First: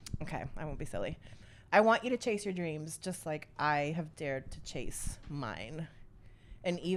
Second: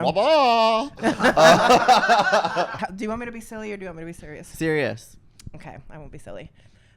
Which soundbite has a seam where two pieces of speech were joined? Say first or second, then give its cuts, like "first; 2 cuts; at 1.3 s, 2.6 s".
second; 1 cut; at 2.7 s